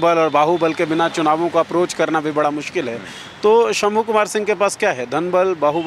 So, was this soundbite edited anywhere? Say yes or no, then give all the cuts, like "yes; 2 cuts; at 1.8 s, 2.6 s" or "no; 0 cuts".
no; 0 cuts